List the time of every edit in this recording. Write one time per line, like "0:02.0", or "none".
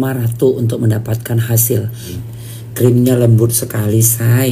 0:02.2